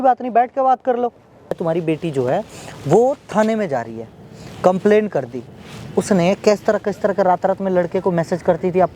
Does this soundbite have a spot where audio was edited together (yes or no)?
yes